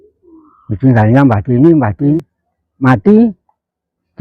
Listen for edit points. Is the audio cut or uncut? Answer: cut